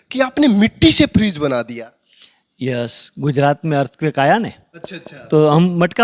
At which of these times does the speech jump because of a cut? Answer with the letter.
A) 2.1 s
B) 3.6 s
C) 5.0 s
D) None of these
D